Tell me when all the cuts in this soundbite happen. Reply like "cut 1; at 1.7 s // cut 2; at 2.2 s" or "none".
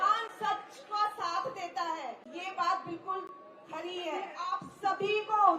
cut 1; at 2.3 s // cut 2; at 4.5 s